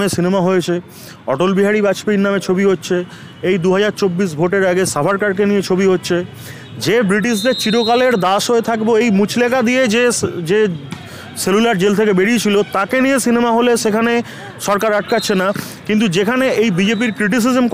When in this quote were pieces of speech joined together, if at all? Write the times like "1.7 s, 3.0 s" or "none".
none